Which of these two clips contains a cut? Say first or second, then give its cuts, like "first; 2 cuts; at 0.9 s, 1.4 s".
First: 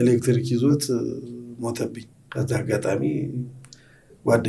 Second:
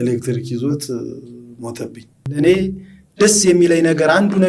second; 1 cut; at 2.2 s